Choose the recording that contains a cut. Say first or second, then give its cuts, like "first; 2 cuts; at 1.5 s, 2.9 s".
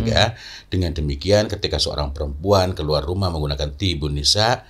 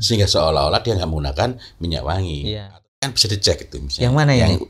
second; 1 cut; at 2.8 s